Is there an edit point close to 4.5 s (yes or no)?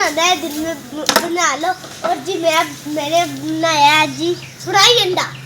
yes